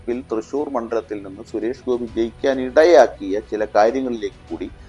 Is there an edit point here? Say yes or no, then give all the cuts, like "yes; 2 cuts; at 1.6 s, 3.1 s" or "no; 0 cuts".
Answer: no; 0 cuts